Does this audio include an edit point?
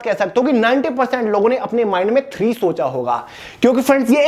no; 0 cuts

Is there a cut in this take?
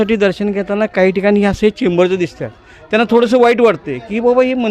no; 0 cuts

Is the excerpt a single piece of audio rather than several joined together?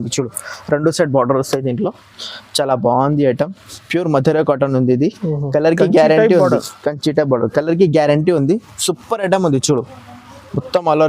yes; 0 cuts

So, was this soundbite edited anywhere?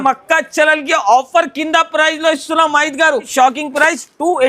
yes; 1 cut; at 3.3 s

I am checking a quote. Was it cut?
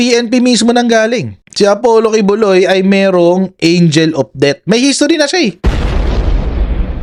no; 0 cuts

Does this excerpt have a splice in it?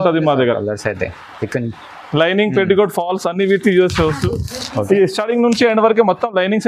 no; 0 cuts

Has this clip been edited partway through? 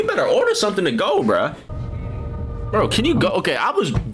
yes; 1 cut; at 1.7 s

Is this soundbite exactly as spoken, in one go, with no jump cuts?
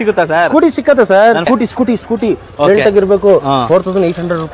no; 1 cut; at 1.5 s

